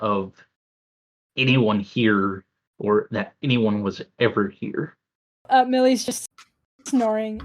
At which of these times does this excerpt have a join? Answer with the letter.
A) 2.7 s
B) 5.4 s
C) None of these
B